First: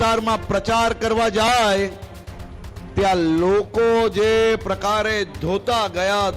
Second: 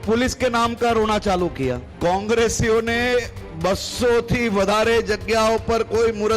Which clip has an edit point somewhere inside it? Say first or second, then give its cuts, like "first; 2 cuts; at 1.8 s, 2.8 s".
second; 1 cut; at 1.9 s